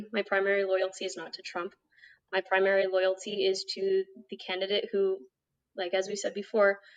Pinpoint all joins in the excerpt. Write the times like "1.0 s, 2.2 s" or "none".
none